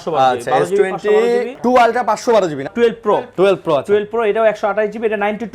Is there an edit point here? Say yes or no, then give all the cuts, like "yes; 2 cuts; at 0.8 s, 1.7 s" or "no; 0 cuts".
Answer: yes; 2 cuts; at 1.5 s, 2.7 s